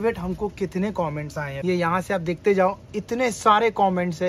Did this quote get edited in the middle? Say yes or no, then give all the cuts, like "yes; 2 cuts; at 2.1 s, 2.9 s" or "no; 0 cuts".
yes; 1 cut; at 1.4 s